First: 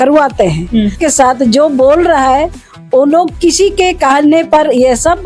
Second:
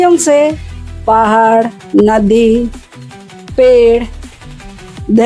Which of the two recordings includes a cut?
first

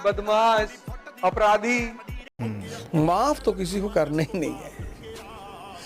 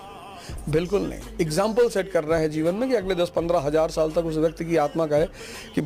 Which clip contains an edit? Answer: first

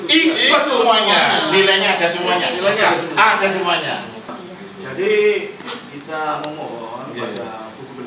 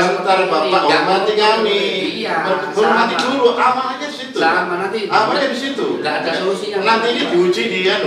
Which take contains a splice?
first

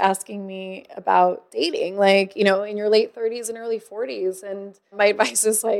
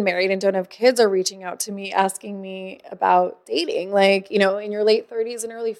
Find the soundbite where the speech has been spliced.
first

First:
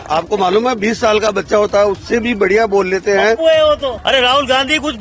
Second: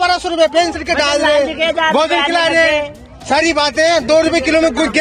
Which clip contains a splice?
first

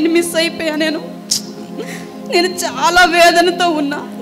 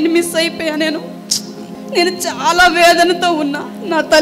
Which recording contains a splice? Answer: second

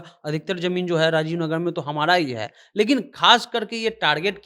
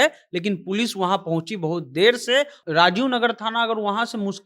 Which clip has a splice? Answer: second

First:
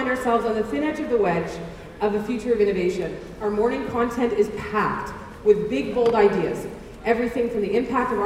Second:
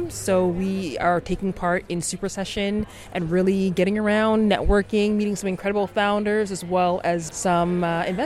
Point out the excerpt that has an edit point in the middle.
second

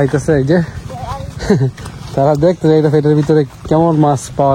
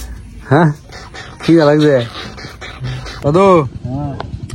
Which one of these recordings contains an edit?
second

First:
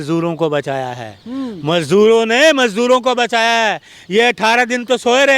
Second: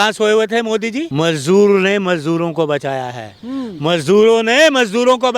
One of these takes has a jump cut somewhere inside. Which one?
second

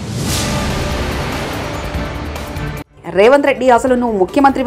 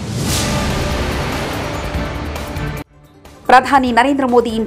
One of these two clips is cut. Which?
second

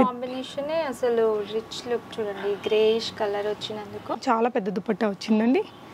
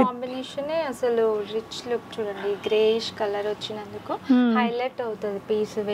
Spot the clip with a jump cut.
first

